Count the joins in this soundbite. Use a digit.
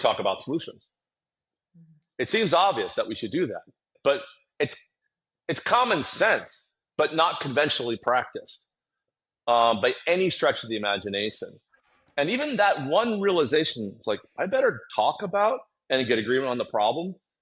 1